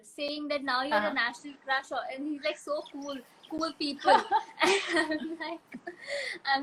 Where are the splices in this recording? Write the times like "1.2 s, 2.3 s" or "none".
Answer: none

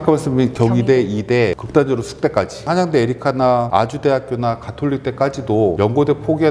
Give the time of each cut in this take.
1.6 s, 2.6 s, 3.7 s, 5.8 s

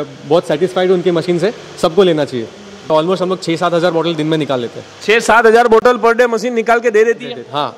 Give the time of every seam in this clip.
2.9 s

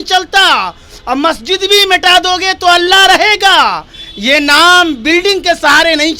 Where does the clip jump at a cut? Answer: none

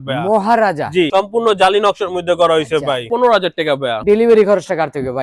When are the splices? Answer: 1.1 s, 3.3 s

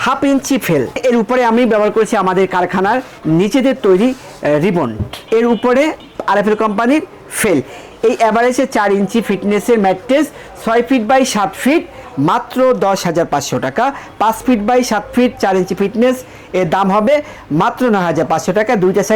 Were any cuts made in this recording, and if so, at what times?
1.0 s, 5.2 s, 6.0 s, 12.0 s

